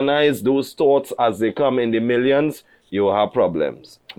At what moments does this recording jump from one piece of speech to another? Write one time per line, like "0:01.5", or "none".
none

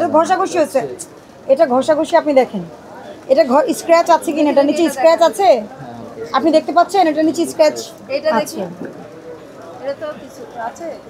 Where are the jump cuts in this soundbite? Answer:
none

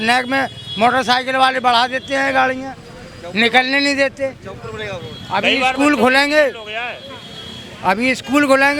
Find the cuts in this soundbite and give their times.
none

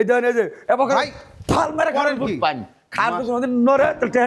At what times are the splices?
none

